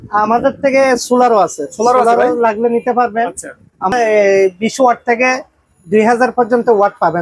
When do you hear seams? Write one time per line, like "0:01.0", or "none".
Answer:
0:03.9